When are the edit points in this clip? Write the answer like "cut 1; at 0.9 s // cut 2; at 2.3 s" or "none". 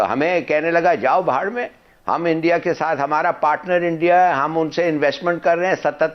none